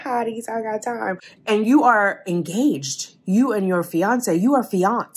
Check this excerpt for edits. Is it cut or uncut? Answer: cut